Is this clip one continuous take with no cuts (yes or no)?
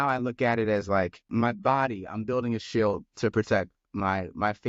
no